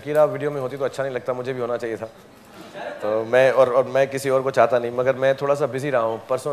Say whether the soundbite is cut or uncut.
uncut